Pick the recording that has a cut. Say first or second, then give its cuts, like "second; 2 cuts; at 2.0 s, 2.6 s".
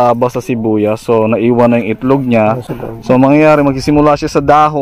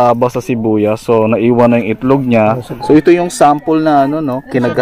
second; 1 cut; at 2.8 s